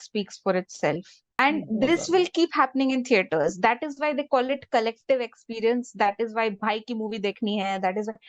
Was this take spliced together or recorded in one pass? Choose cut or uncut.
cut